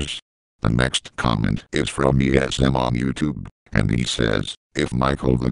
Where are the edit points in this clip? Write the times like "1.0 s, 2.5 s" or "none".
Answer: 1.8 s